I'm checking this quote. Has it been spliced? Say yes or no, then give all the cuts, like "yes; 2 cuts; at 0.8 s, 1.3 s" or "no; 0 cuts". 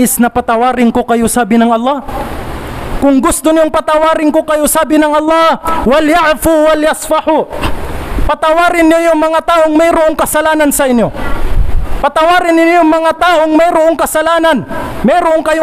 no; 0 cuts